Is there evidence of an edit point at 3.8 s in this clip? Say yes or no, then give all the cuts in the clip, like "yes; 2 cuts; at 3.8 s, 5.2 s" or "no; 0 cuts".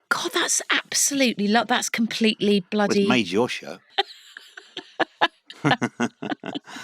yes; 1 cut; at 3.8 s